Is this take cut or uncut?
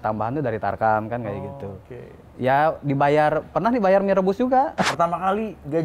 cut